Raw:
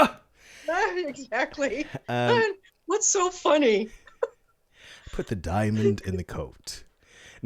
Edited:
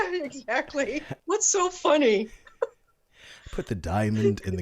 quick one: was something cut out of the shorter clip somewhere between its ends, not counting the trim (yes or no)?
yes